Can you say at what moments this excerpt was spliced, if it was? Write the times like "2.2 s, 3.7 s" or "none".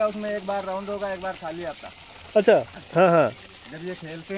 2.3 s